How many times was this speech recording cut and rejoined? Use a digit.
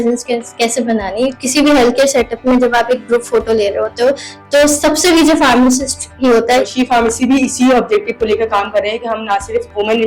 2